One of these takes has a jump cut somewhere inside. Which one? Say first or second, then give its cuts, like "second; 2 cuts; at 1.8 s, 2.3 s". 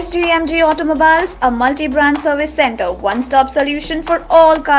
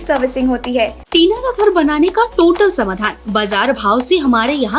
second; 1 cut; at 1.0 s